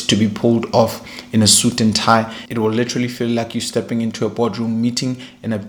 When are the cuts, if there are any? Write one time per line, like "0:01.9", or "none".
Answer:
none